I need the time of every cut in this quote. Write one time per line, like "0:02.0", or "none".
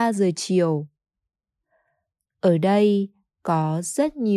0:01.9